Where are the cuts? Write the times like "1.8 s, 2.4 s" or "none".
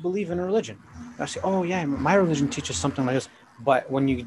3.3 s